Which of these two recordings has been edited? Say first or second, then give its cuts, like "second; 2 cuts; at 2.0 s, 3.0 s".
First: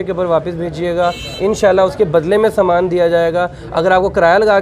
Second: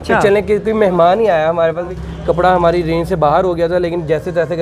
second; 1 cut; at 1.9 s